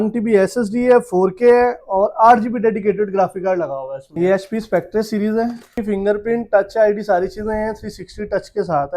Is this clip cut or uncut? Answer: cut